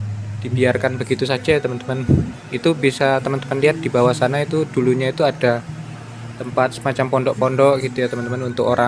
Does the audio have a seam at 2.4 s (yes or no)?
no